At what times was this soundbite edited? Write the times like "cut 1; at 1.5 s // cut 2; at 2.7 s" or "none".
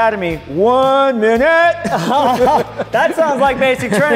none